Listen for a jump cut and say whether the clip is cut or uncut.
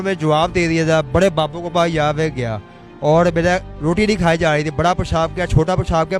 uncut